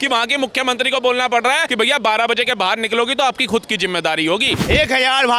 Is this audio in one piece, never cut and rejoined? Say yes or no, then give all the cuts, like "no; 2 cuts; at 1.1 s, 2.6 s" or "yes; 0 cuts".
no; 2 cuts; at 1.7 s, 4.6 s